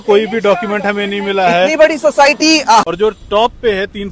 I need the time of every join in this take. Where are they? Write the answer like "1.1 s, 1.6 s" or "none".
2.8 s

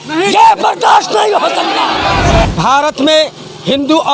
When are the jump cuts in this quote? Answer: 2.5 s

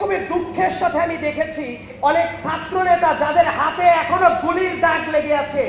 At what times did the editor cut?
1.9 s

